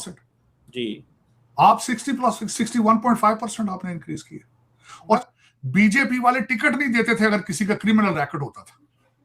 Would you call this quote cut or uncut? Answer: cut